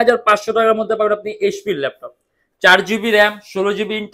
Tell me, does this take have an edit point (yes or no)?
no